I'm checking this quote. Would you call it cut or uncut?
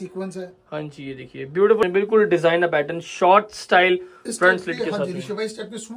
cut